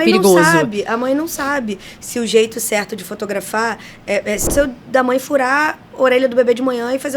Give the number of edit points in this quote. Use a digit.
1